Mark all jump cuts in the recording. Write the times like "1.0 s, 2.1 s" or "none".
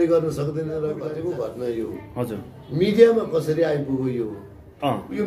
1.0 s